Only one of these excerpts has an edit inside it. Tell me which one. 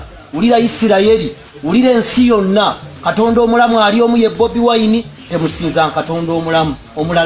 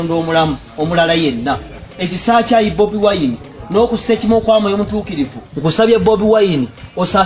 second; 1 cut; at 5.4 s

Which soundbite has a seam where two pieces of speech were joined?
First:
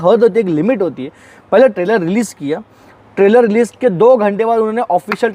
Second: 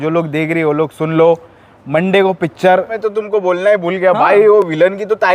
second; 1 cut; at 2.9 s

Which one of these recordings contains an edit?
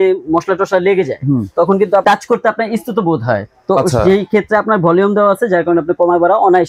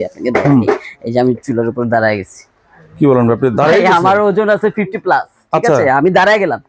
first; 1 cut; at 2.0 s

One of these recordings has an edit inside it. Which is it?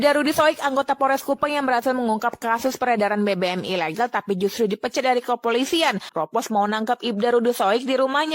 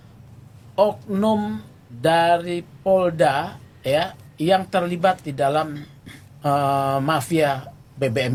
first; 1 cut; at 6.1 s

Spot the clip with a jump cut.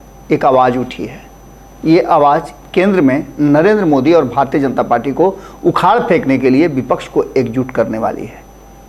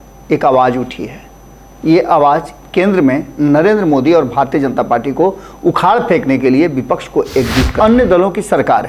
second; 1 cut; at 7.7 s

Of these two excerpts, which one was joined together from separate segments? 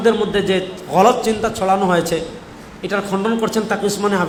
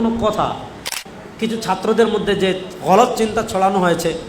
second; 1 cut; at 0.9 s

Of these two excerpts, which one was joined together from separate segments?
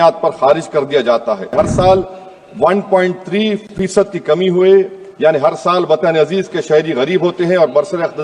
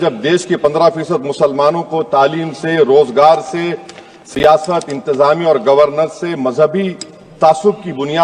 first; 1 cut; at 1.5 s

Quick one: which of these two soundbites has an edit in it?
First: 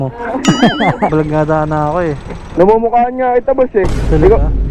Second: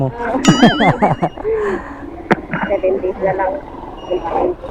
first; 1 cut; at 1.1 s

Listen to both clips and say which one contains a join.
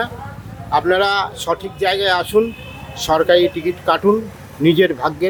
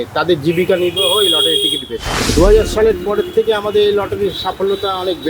second; 1 cut; at 2.1 s

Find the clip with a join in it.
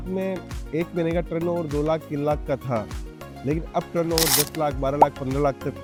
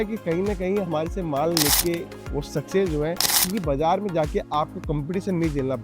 second; 1 cut; at 3.3 s

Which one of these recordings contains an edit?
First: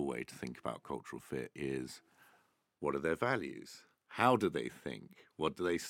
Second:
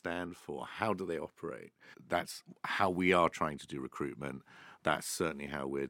second; 1 cut; at 2.0 s

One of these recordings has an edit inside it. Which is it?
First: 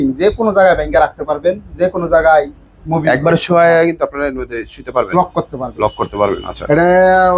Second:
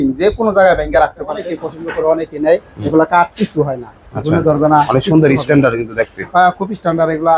second; 1 cut; at 1.4 s

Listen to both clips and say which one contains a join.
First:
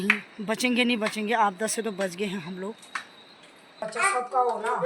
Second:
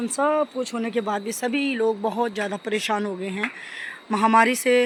first; 1 cut; at 3.8 s

